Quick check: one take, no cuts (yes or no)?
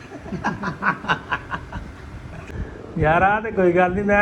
no